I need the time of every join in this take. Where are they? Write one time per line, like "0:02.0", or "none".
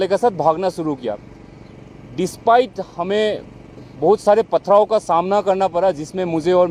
none